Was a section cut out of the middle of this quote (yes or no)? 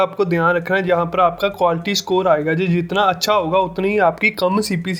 no